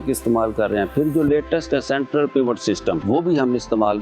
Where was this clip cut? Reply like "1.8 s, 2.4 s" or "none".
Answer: 3.0 s